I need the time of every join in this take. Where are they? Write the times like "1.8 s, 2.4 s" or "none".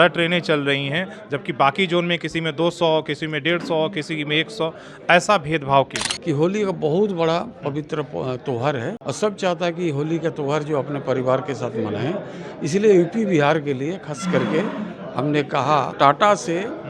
6.1 s, 9.0 s, 15.9 s

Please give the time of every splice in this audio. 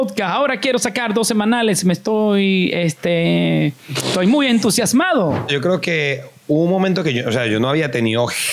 5.5 s

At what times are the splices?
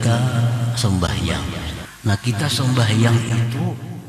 1.8 s

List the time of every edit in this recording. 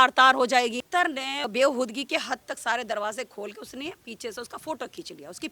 1.1 s

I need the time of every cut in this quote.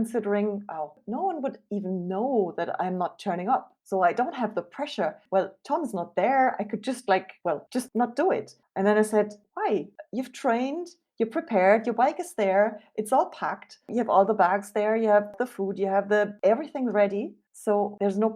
1.0 s, 5.2 s, 7.6 s, 8.6 s

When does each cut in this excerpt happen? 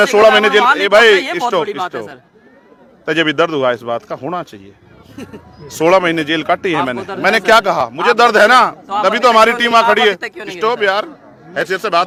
none

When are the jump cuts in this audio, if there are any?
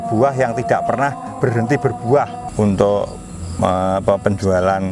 2.4 s

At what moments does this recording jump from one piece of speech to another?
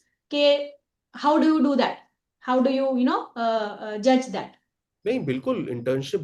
none

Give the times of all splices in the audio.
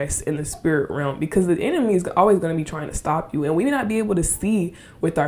none

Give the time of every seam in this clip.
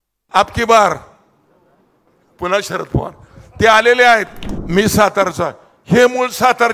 4.5 s

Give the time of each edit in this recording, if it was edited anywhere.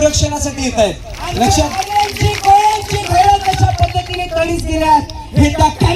1.7 s

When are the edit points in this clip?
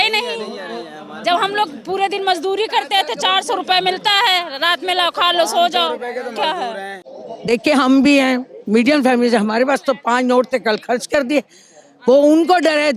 7.1 s

